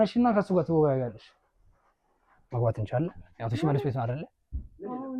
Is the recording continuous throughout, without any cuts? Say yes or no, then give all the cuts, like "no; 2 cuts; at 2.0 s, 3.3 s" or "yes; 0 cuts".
no; 1 cut; at 2.4 s